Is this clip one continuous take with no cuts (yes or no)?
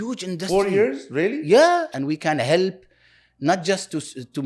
no